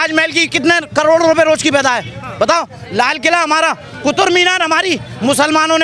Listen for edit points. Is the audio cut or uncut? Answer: uncut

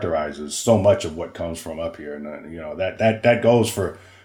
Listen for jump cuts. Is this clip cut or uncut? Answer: uncut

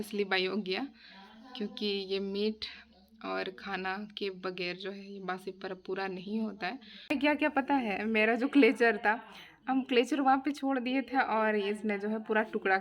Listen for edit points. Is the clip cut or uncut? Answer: cut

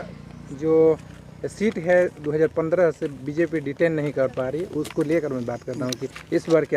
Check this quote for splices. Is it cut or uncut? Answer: uncut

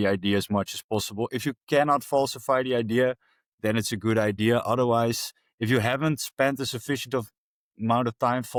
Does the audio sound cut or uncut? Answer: uncut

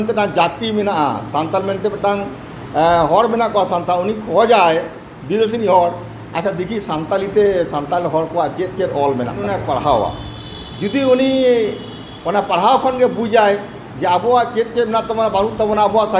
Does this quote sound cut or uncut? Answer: cut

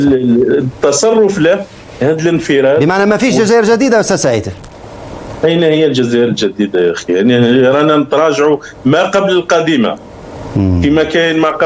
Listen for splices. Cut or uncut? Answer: uncut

